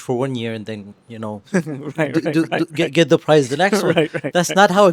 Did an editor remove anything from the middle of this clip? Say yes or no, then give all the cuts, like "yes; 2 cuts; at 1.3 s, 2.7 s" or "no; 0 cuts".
no; 0 cuts